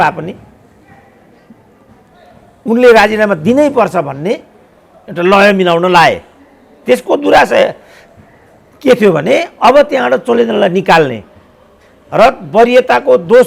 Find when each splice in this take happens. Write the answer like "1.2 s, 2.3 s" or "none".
none